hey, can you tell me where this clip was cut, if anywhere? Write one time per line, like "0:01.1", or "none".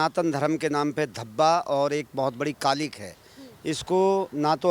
none